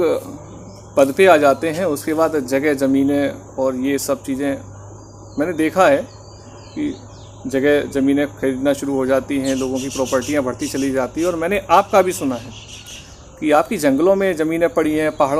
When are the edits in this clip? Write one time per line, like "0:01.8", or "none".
none